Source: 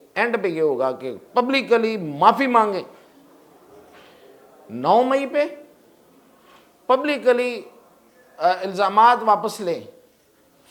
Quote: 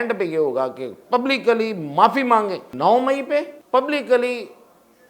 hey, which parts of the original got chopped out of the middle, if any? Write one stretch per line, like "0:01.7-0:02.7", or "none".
0:02.9-0:04.7
0:05.6-0:06.7